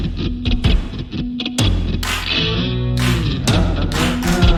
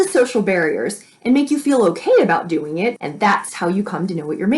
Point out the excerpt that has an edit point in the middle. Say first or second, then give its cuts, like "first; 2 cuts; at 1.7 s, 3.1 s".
second; 1 cut; at 3.0 s